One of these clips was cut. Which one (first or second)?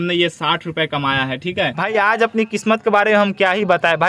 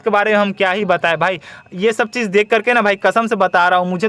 first